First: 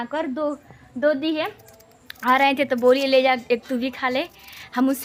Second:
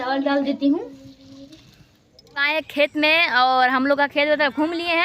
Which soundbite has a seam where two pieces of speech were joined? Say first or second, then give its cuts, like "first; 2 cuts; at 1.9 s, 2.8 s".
second; 1 cut; at 2.4 s